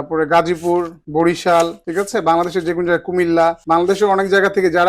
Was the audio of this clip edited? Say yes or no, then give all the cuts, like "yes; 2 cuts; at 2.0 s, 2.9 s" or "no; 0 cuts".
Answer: yes; 3 cuts; at 1.0 s, 1.8 s, 3.6 s